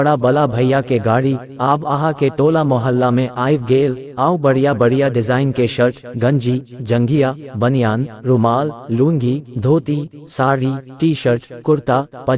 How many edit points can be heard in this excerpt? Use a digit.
1